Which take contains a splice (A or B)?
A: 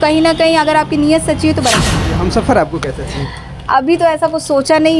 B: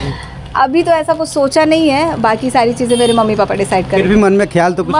A